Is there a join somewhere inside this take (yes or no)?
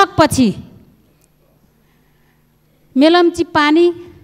no